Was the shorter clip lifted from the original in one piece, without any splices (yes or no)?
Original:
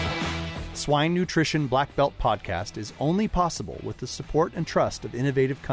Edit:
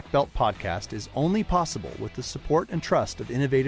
yes